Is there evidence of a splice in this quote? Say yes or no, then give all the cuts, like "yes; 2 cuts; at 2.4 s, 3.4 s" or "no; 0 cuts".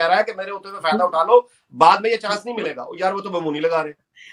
no; 0 cuts